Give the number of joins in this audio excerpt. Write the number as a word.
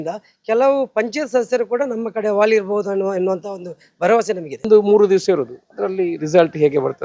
one